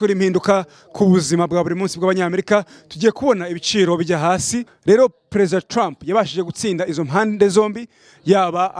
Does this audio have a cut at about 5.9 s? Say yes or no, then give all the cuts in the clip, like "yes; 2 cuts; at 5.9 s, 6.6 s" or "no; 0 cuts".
no; 1 cut; at 4.6 s